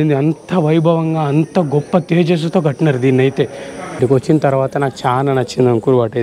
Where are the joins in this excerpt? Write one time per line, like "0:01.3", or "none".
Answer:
0:04.0